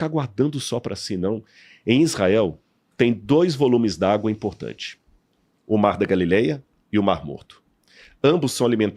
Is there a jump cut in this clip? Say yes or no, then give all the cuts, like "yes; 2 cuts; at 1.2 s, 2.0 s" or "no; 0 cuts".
no; 0 cuts